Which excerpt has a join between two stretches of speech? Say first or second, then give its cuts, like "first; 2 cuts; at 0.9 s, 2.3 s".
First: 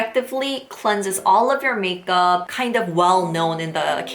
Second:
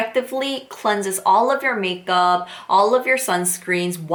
first; 1 cut; at 2.5 s